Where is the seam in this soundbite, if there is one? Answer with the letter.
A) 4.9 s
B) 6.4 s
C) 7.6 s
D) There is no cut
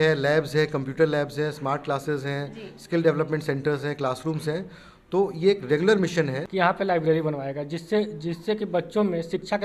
B